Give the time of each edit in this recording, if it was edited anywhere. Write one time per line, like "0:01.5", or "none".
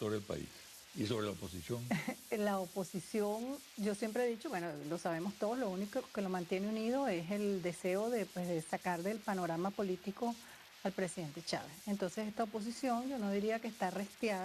0:01.6